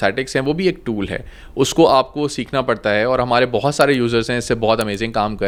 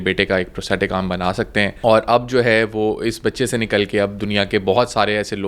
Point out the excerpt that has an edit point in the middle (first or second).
second